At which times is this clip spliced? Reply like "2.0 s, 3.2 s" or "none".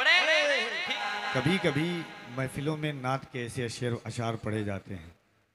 1.0 s

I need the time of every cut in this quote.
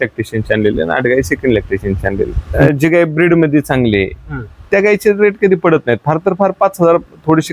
2.4 s

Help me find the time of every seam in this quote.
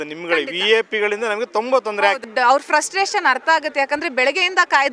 2.2 s

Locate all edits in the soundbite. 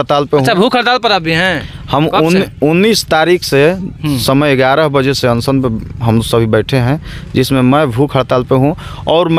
none

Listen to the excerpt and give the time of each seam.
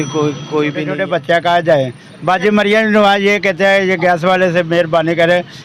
0.9 s

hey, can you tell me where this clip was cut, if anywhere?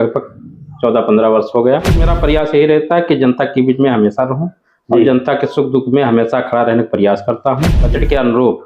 2.0 s, 7.8 s

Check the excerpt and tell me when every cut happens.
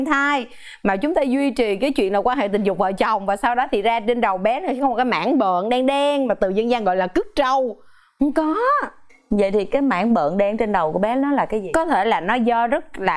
none

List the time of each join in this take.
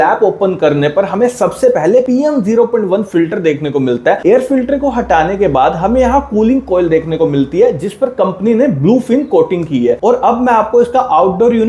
4.2 s, 10.0 s

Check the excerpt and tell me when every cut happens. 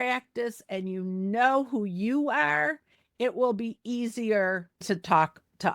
4.8 s

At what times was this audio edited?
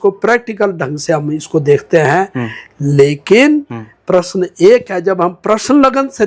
none

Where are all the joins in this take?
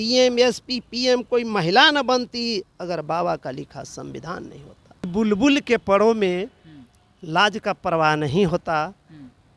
5.0 s

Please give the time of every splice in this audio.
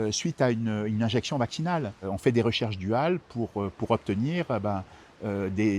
2.0 s

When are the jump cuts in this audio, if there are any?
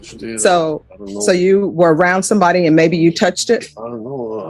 none

